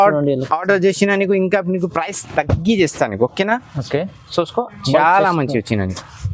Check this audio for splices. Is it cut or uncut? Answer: uncut